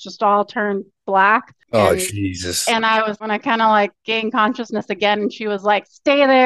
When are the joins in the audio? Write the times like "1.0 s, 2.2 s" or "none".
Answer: 1.6 s, 3.2 s